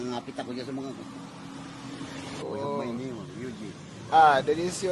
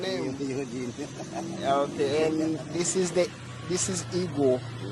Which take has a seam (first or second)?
first